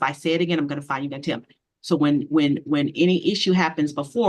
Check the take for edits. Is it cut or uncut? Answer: uncut